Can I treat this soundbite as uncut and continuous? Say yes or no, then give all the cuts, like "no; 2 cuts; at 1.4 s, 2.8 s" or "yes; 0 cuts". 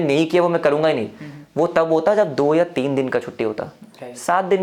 yes; 0 cuts